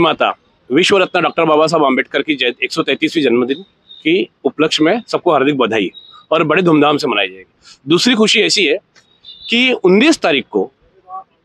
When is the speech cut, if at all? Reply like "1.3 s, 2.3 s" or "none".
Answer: none